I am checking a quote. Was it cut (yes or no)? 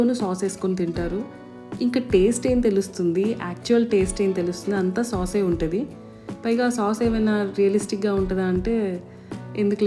no